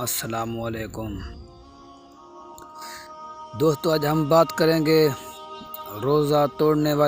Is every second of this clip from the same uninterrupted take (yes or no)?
yes